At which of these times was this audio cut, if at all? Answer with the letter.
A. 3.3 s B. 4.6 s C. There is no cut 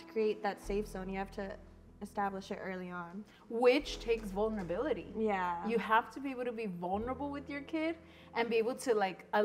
C